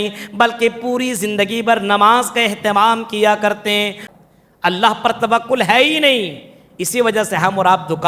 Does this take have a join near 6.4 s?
no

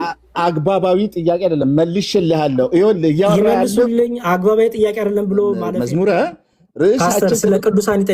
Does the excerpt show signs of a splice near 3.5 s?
no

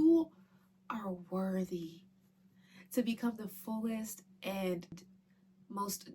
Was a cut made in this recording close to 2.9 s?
no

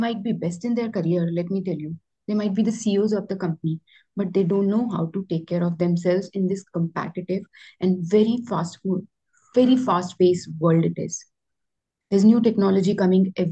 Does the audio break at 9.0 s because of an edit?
no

